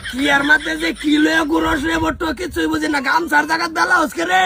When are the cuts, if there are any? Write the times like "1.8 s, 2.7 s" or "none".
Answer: none